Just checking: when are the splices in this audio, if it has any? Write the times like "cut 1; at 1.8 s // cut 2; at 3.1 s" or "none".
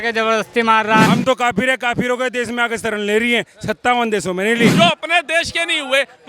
cut 1; at 1.1 s // cut 2; at 4.7 s